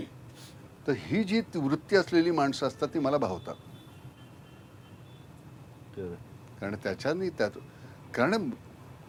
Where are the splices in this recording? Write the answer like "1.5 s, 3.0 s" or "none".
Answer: none